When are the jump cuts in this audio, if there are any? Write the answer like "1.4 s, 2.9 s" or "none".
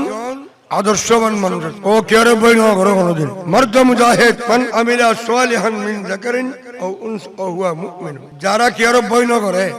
1.7 s, 3.3 s, 4.4 s, 8.2 s

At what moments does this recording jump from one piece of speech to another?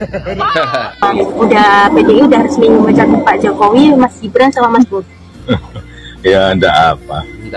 1.0 s

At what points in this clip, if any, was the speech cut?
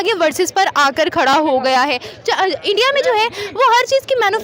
none

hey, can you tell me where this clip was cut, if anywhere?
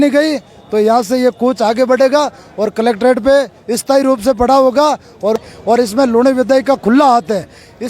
5.4 s

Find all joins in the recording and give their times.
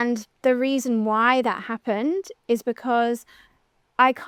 none

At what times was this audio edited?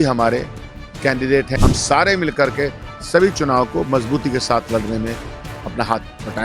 1.6 s

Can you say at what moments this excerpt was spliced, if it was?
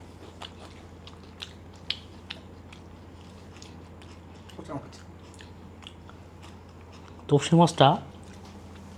none

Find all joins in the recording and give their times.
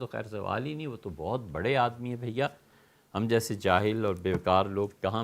none

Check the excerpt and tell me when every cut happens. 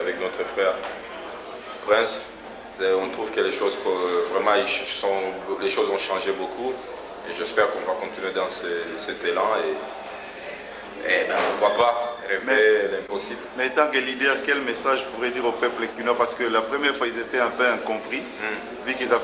5.4 s

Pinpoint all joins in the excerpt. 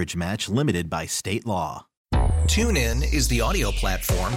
1.9 s

